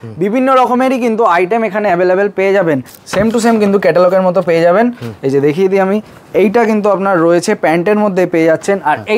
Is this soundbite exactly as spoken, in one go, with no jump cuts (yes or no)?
no